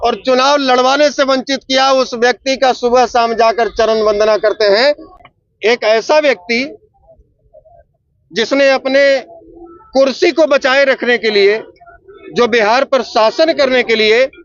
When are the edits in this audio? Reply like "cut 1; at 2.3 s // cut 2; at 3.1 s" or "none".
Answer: cut 1; at 5.1 s